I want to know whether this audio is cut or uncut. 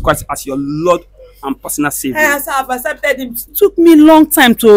cut